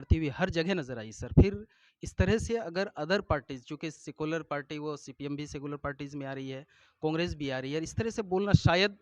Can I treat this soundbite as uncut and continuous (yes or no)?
yes